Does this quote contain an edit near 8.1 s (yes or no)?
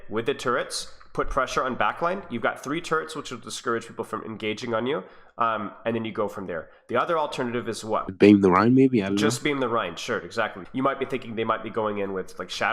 yes